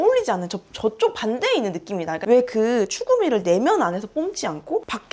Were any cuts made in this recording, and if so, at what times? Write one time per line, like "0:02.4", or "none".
0:02.2